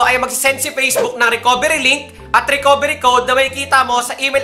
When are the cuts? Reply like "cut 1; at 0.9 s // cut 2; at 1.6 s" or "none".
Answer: none